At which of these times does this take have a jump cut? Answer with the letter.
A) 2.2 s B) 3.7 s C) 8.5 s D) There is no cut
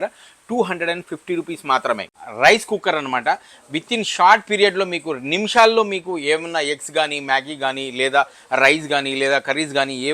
A